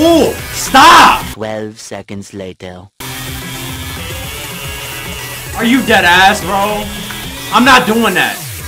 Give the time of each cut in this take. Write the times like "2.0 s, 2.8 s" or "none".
none